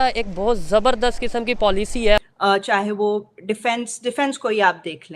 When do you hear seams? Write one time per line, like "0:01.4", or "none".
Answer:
0:02.3